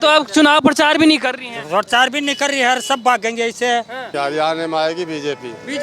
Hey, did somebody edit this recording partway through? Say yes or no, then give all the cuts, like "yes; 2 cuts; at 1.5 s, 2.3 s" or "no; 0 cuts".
yes; 1 cut; at 4.0 s